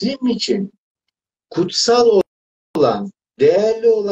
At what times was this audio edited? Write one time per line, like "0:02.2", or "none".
none